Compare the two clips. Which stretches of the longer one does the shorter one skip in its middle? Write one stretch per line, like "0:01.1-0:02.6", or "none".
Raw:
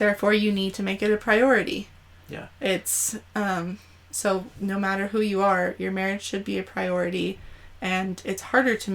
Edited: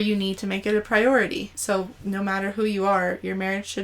0:01.9-0:04.1